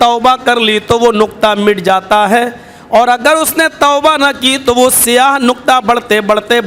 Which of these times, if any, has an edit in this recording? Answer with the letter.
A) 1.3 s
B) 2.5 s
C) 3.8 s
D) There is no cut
D